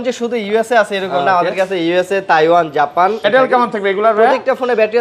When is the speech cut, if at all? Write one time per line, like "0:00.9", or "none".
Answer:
0:03.3

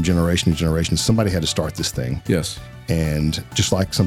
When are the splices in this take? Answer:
none

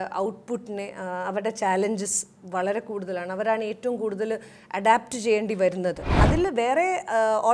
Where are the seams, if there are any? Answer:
0:06.2

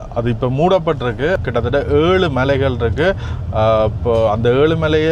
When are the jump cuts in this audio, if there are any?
0:01.4

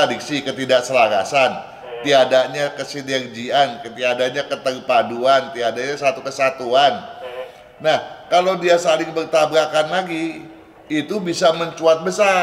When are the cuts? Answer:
none

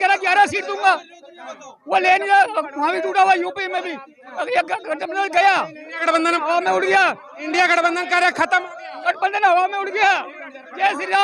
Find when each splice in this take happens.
0:08.9

